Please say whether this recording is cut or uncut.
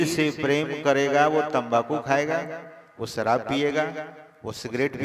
uncut